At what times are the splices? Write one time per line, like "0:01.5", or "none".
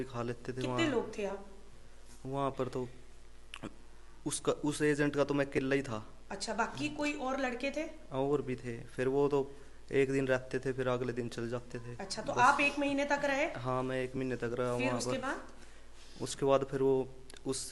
none